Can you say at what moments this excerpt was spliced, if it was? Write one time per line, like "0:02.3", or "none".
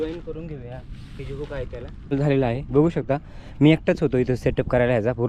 0:02.1